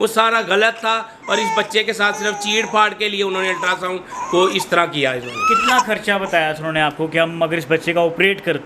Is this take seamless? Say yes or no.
yes